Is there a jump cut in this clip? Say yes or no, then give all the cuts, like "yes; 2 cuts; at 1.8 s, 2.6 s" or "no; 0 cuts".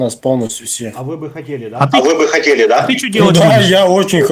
no; 0 cuts